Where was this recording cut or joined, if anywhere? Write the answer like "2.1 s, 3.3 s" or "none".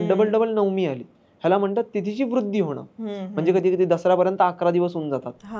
none